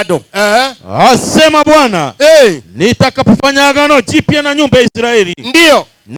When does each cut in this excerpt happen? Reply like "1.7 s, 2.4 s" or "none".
none